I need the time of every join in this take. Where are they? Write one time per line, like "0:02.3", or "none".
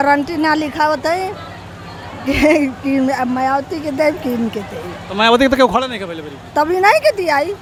none